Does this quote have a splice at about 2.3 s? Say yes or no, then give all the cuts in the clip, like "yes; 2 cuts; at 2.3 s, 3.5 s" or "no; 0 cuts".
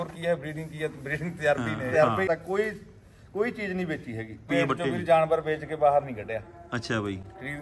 yes; 2 cuts; at 2.3 s, 4.5 s